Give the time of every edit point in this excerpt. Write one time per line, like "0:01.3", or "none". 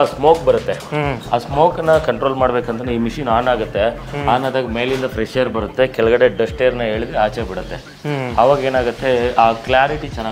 none

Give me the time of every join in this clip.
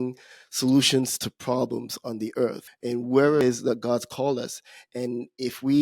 0:02.7
0:03.4

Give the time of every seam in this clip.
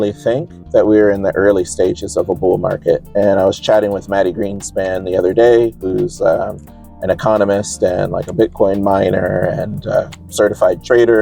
none

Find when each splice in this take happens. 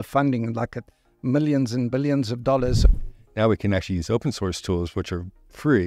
0:02.9

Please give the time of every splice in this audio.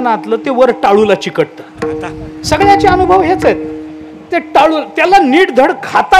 none

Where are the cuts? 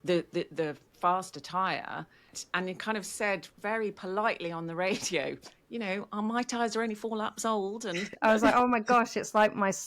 0:02.4
0:08.1

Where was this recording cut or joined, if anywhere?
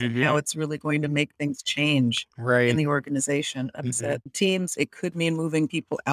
0:04.8

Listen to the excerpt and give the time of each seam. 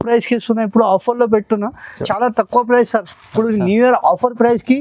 0:02.1

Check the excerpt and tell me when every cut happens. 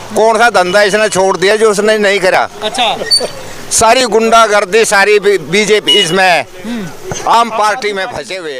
none

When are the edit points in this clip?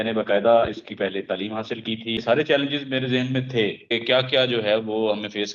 0:02.2
0:03.9

